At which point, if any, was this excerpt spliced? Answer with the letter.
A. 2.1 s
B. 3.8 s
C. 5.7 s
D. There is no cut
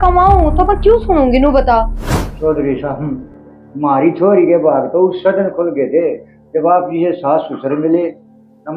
A